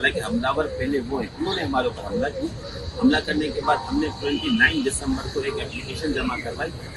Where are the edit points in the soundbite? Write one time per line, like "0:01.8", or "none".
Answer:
none